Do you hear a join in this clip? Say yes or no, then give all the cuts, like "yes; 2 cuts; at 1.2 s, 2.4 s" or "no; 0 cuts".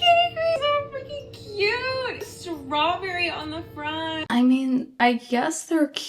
yes; 1 cut; at 4.2 s